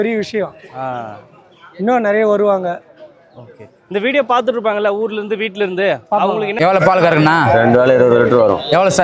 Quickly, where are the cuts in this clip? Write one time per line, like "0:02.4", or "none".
none